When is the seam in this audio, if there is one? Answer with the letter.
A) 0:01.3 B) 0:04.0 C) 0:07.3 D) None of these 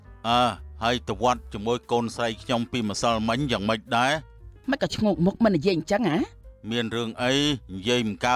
D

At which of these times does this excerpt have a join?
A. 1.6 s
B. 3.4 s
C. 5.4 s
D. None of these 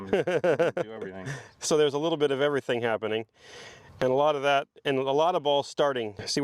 D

